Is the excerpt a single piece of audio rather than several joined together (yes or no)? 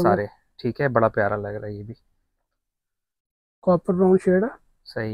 yes